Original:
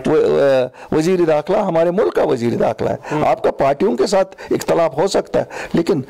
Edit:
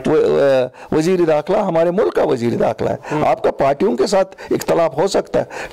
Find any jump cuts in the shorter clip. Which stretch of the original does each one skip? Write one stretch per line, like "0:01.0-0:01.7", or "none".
none